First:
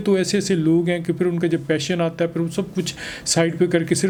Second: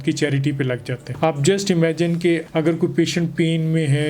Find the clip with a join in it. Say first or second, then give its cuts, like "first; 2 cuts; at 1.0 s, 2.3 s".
second; 2 cuts; at 1.0 s, 2.4 s